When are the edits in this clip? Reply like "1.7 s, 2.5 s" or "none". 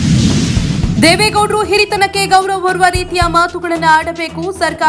0.9 s